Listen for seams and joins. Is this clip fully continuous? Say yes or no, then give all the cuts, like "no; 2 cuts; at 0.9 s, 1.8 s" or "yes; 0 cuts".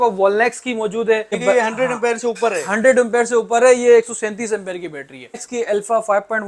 no; 2 cuts; at 1.4 s, 5.5 s